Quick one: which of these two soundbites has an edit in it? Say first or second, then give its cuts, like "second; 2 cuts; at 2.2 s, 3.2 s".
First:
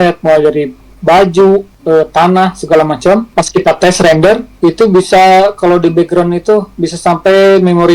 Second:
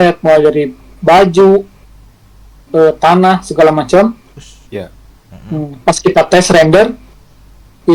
first; 3 cuts; at 1.7 s, 3.3 s, 4.5 s